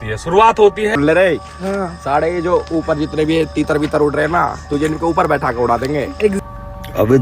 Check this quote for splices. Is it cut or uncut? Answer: cut